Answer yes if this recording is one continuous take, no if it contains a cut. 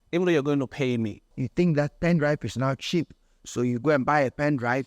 no